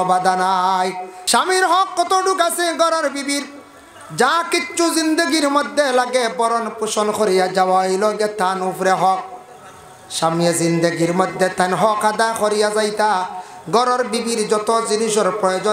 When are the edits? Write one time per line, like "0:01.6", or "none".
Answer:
0:01.1